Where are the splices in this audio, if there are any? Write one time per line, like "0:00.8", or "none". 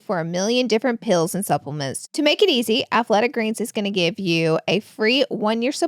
0:02.0